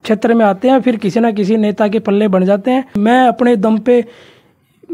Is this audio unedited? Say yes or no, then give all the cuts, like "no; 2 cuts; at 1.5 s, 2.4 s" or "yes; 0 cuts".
no; 1 cut; at 2.9 s